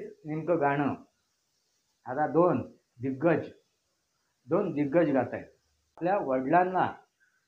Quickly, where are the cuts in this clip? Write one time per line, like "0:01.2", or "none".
0:06.0